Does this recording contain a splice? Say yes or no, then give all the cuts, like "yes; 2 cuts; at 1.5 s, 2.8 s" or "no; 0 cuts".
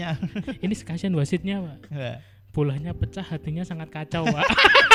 no; 0 cuts